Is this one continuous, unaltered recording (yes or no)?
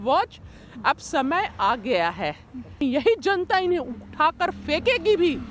no